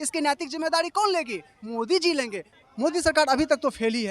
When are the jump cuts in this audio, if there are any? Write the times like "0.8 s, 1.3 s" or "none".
2.5 s